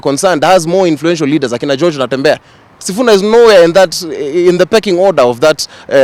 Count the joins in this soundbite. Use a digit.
0